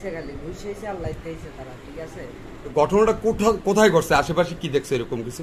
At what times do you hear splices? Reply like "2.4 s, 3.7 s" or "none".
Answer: 2.7 s